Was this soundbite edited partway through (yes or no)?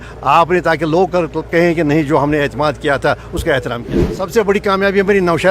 yes